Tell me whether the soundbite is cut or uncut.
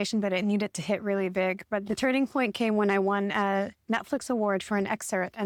uncut